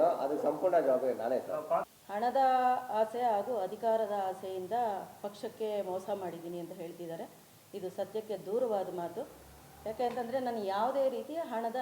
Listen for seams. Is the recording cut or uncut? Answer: cut